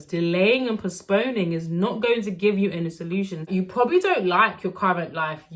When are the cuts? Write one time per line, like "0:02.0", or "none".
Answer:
0:03.4